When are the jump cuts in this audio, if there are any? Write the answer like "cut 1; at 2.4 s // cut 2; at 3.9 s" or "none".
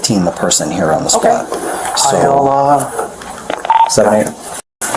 cut 1; at 3.6 s